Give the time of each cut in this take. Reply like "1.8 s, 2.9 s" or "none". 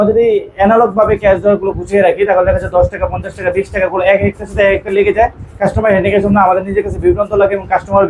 none